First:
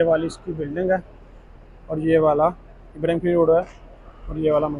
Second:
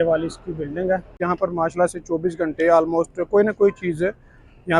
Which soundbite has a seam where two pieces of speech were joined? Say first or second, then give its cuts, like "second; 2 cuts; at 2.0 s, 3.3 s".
second; 1 cut; at 1.2 s